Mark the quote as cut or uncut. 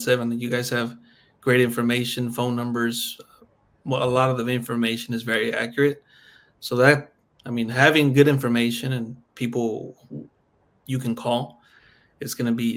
uncut